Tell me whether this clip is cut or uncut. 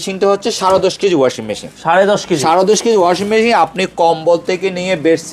uncut